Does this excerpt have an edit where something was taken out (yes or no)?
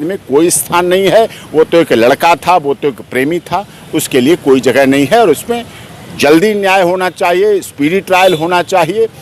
no